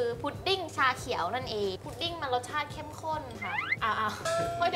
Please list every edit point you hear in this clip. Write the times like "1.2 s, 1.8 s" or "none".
1.8 s